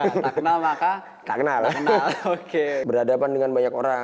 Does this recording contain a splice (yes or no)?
yes